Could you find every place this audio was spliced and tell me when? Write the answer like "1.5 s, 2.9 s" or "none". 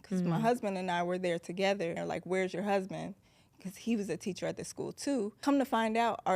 2.0 s, 5.4 s